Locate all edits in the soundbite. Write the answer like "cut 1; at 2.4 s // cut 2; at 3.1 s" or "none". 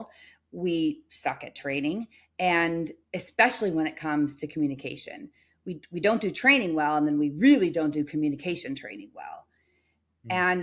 none